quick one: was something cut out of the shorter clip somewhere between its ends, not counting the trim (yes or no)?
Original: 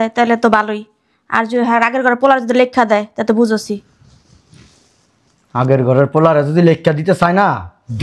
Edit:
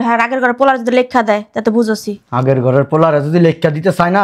yes